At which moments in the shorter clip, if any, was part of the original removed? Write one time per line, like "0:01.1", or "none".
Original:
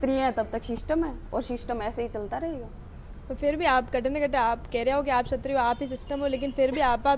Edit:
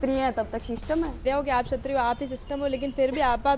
0:01.2

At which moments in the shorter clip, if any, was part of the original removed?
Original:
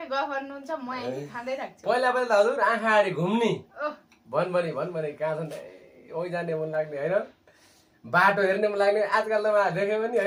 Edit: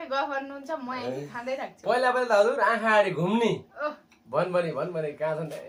none

